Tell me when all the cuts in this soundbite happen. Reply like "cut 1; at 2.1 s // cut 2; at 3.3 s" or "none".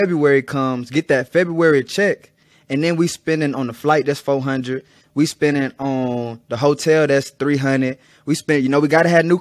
none